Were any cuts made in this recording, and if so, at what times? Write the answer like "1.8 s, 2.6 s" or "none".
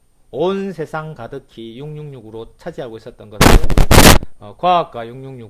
none

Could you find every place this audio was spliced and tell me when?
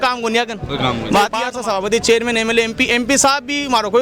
1.5 s

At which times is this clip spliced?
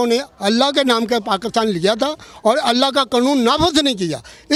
none

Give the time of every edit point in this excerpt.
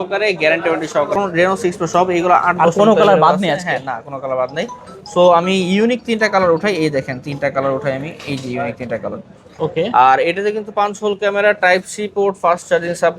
1.2 s, 9.5 s

